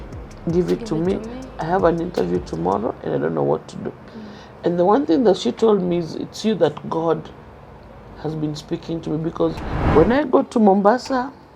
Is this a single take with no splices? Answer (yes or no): no